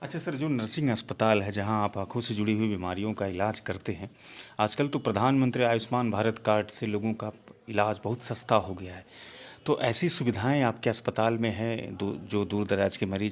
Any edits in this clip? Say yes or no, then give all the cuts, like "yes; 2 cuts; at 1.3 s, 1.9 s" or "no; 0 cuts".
no; 0 cuts